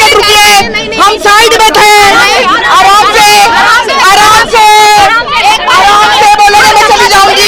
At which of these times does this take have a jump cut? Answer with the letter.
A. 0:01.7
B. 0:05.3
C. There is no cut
C